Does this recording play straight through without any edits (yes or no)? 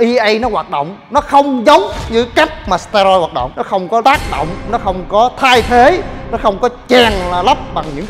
no